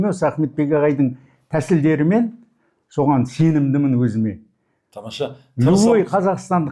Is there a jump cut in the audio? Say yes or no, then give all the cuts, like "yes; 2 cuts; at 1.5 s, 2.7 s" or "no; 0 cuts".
no; 0 cuts